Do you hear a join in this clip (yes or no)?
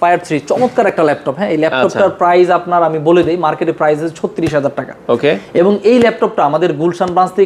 no